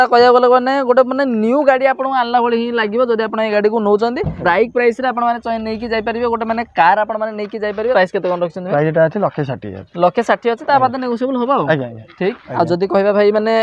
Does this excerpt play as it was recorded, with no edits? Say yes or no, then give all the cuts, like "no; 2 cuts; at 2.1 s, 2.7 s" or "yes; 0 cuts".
no; 3 cuts; at 4.4 s, 7.9 s, 12.4 s